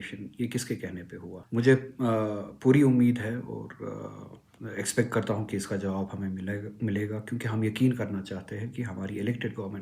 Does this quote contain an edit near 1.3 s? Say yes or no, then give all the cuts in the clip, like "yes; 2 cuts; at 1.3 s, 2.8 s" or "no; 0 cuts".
yes; 1 cut; at 1.3 s